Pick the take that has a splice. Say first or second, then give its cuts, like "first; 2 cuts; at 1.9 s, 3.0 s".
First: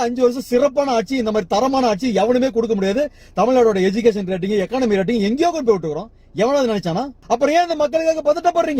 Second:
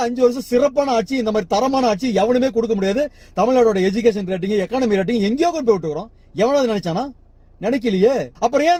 first; 1 cut; at 7.2 s